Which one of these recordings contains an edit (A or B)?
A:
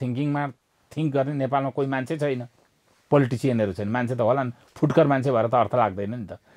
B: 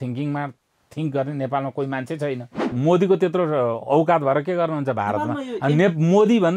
B